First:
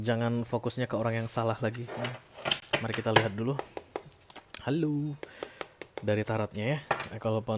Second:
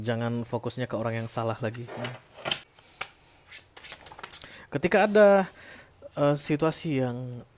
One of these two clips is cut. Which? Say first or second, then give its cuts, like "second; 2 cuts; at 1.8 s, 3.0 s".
second; 1 cut; at 2.6 s